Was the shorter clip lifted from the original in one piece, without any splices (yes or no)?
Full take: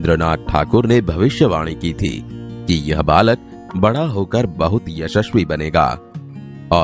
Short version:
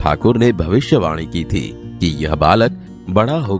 no